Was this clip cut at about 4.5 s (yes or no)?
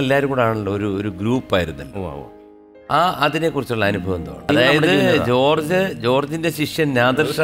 yes